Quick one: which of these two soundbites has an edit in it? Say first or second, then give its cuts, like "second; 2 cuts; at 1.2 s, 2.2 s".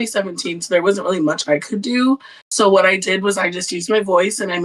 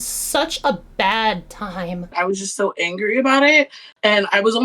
second; 1 cut; at 2.1 s